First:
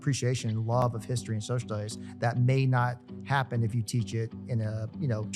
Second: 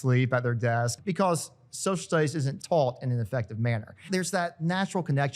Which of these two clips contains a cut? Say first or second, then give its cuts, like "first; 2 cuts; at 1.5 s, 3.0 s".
second; 3 cuts; at 0.9 s, 2.5 s, 4.0 s